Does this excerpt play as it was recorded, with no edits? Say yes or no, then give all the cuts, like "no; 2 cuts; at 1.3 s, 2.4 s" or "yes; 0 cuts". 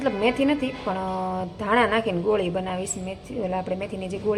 yes; 0 cuts